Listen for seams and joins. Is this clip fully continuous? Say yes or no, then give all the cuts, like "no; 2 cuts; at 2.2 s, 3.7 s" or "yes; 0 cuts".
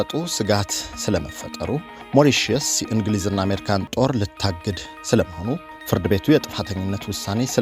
no; 2 cuts; at 2.0 s, 5.7 s